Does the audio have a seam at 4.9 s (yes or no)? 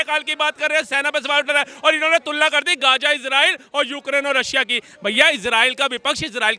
no